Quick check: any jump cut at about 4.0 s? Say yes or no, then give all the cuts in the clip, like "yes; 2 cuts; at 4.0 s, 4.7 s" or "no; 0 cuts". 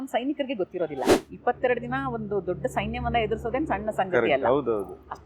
no; 1 cut; at 1.2 s